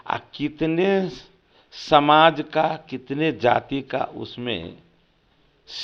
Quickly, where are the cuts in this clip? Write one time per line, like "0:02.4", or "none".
none

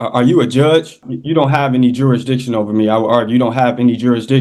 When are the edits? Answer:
0:01.1

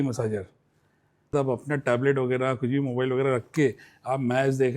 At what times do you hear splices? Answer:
0:01.3

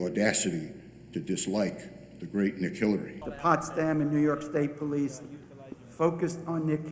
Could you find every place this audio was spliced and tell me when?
0:03.2

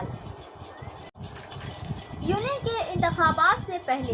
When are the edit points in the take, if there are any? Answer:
0:01.1

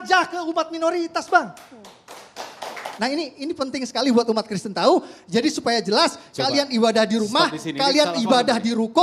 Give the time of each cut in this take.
0:02.8

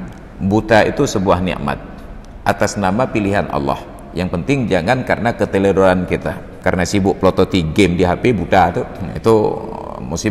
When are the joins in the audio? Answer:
0:06.5
0:09.0

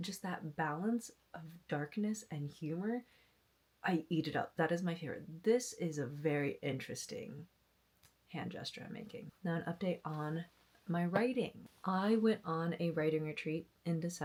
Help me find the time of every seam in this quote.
none

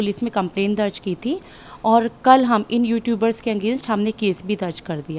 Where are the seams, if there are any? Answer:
none

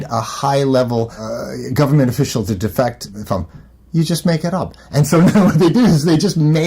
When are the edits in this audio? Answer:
0:01.3
0:03.1

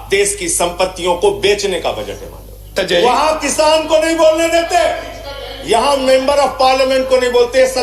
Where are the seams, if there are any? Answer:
0:02.7

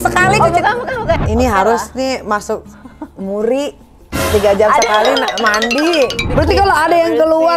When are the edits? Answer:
0:01.2
0:06.2

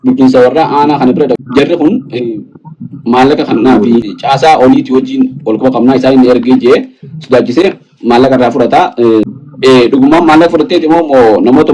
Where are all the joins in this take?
0:01.4
0:04.1
0:09.3

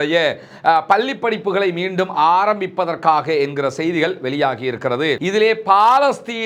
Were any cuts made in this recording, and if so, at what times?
0:05.2

